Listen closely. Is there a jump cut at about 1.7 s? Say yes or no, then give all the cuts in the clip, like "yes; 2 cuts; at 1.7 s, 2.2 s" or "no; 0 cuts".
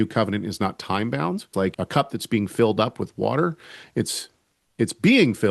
yes; 1 cut; at 1.7 s